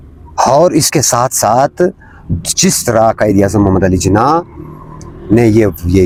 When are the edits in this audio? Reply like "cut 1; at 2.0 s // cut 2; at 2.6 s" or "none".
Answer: none